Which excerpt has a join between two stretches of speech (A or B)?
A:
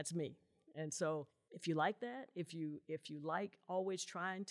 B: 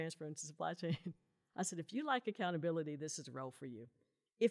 A